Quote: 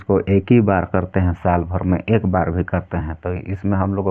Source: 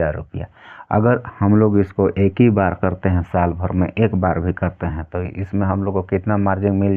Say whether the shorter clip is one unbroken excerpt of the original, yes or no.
yes